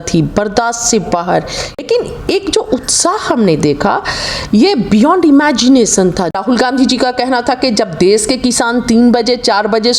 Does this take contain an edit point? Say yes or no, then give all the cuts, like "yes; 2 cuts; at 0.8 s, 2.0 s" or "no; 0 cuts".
yes; 2 cuts; at 1.8 s, 6.4 s